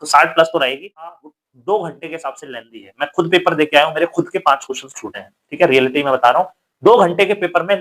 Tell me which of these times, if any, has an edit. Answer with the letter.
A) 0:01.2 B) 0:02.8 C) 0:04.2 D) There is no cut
A